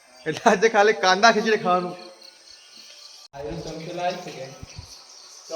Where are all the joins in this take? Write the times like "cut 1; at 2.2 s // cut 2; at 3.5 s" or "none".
cut 1; at 3.3 s